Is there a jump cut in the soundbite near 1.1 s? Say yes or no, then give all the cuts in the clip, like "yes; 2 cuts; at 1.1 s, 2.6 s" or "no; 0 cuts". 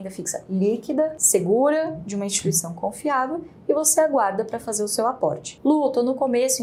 no; 0 cuts